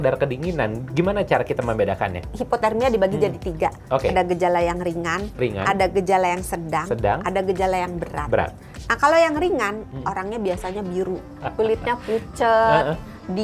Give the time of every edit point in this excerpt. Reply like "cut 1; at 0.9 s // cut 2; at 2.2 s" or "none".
cut 1; at 2.3 s // cut 2; at 11.4 s